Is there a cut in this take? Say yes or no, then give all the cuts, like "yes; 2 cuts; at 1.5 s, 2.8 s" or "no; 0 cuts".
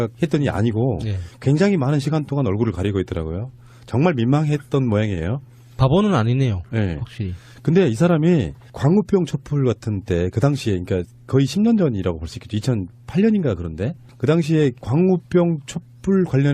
yes; 1 cut; at 3.6 s